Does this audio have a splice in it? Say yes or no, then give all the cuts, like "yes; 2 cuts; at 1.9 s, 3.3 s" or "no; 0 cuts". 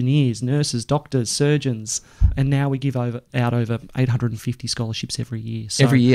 yes; 1 cut; at 2.3 s